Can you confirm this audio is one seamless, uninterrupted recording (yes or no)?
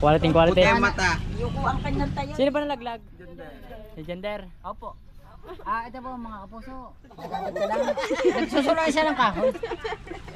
yes